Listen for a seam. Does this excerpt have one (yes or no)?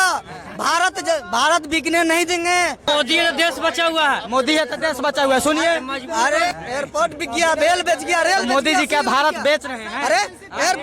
yes